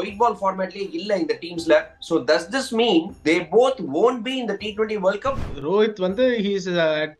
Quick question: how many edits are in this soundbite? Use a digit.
2